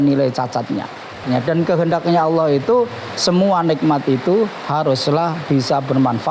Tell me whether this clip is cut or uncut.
cut